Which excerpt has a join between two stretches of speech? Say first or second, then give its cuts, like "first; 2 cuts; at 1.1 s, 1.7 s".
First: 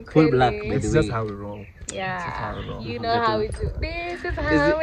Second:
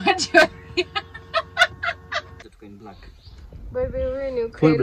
second; 1 cut; at 2.4 s